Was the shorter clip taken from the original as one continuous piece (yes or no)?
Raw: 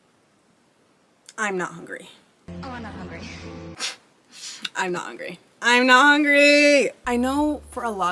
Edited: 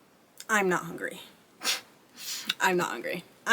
no